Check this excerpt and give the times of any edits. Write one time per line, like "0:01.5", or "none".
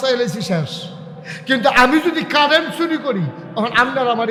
none